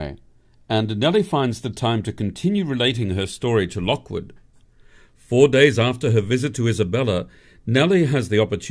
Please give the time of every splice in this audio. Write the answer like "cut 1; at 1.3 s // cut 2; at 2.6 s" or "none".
cut 1; at 6.5 s

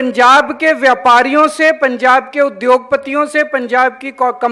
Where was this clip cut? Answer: none

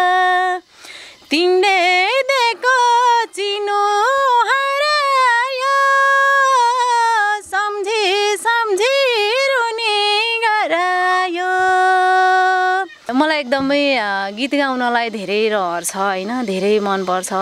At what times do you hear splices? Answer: cut 1; at 13.1 s

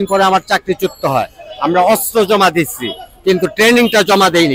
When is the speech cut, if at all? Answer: none

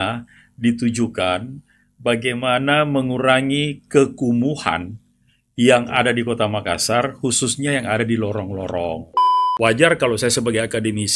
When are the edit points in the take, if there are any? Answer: cut 1; at 9.4 s

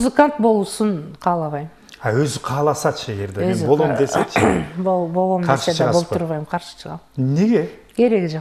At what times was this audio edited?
none

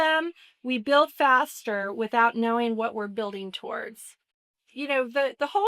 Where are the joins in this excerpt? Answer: cut 1; at 4.5 s

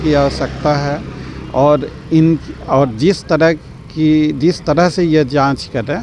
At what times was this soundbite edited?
none

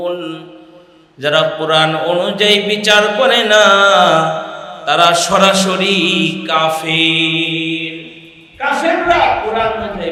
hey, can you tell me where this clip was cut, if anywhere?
none

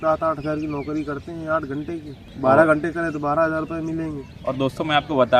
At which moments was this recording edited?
cut 1; at 2.2 s // cut 2; at 4.3 s

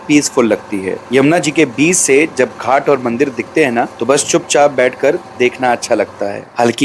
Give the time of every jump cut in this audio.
none

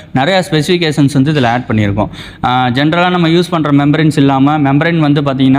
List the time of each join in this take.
none

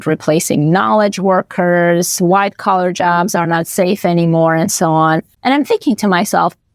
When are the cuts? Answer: cut 1; at 5.3 s

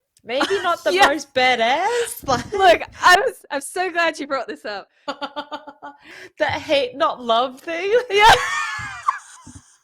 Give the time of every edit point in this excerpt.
cut 1; at 6.2 s

